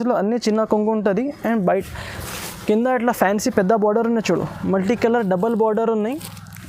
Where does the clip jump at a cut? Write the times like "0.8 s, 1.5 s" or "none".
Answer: none